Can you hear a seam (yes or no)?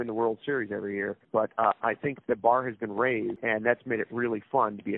yes